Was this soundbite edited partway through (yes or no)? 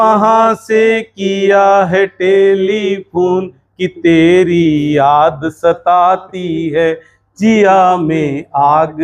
no